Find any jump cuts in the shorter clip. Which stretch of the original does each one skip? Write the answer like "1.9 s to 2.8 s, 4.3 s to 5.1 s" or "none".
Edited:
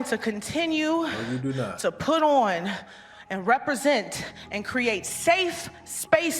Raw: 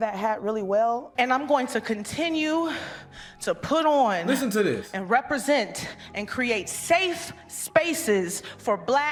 none